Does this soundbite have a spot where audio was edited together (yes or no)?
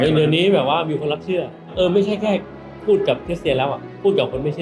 yes